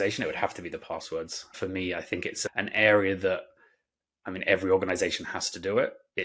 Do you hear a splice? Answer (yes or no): yes